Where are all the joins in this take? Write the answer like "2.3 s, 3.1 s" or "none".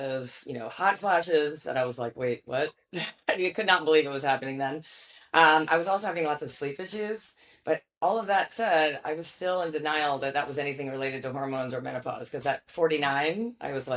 none